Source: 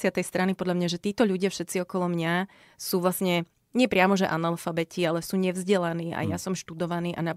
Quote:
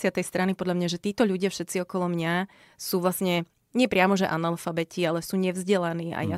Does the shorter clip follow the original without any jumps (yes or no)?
yes